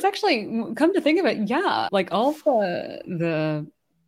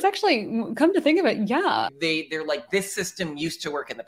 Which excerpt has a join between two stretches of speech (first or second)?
second